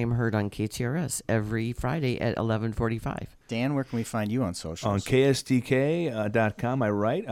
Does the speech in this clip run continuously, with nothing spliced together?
no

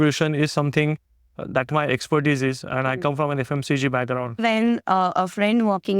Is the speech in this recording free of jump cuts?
no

